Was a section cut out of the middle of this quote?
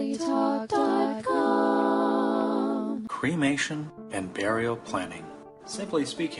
yes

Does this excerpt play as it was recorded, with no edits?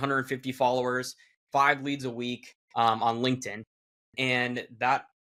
yes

